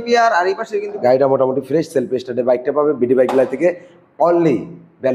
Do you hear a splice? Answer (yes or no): yes